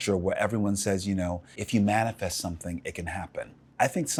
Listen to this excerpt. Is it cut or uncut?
uncut